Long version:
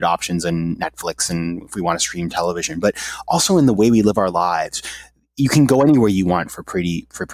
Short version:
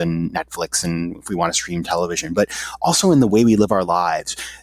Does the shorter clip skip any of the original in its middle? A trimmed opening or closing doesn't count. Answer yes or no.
no